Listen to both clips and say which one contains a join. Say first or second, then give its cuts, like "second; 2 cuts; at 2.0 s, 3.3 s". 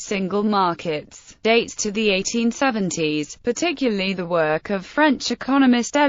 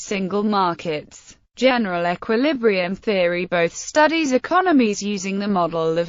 second; 1 cut; at 1.3 s